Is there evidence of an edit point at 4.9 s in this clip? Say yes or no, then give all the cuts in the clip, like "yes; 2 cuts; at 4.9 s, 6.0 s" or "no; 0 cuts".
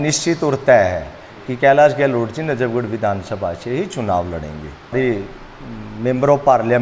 yes; 1 cut; at 4.9 s